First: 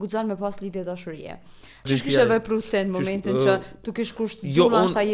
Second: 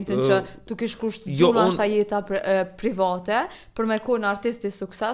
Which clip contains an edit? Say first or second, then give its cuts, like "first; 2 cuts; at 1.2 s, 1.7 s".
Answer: first; 1 cut; at 1.9 s